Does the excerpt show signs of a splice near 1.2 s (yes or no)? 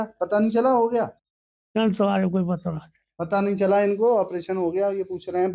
yes